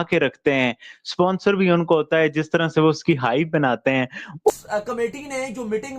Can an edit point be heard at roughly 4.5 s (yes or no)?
yes